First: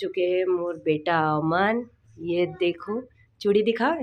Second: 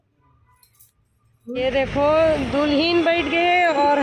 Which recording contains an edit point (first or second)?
second